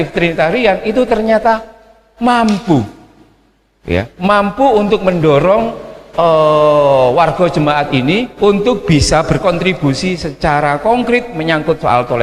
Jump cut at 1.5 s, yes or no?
no